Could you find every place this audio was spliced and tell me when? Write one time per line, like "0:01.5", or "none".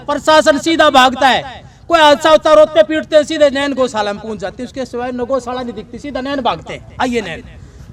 none

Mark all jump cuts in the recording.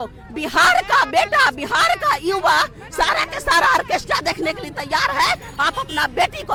none

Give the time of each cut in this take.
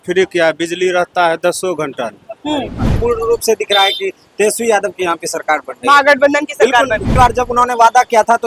0:02.9
0:07.1

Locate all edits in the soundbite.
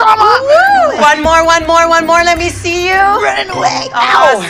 none

